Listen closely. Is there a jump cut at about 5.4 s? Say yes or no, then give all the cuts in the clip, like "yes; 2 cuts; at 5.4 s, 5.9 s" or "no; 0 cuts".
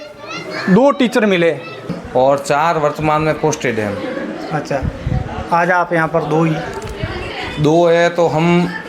no; 1 cut; at 1.9 s